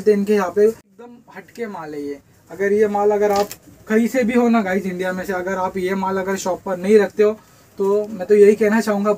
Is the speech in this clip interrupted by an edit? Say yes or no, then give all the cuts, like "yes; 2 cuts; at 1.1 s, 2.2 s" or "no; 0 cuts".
yes; 1 cut; at 0.9 s